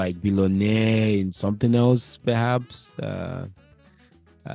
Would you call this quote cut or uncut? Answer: uncut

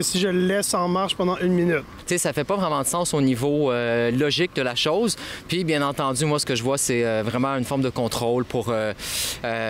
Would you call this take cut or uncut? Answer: cut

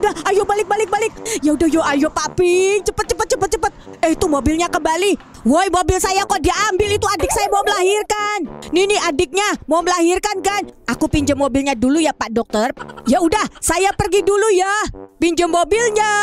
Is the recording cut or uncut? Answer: cut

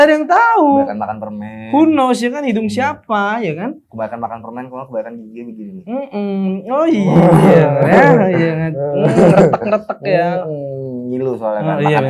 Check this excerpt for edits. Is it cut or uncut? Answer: uncut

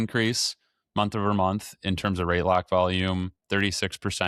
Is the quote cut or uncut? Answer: uncut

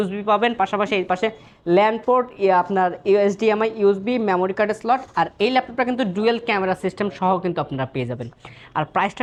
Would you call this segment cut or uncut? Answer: uncut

